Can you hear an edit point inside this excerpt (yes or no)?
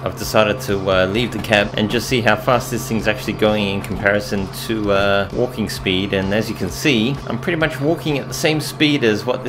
yes